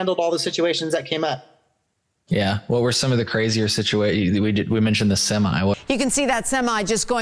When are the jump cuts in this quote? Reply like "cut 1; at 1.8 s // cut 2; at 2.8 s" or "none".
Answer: cut 1; at 5.7 s